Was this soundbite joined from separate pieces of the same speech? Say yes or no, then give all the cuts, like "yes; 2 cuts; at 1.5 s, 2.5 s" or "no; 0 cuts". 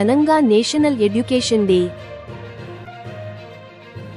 no; 0 cuts